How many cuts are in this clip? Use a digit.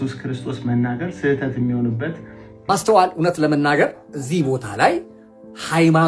1